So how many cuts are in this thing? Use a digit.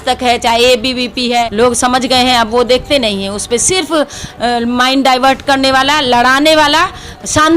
1